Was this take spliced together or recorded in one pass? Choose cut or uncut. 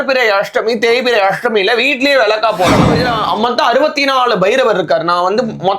cut